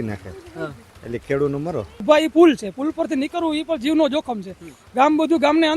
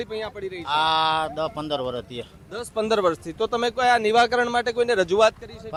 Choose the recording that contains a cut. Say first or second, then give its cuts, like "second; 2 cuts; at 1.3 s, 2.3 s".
first; 1 cut; at 1.9 s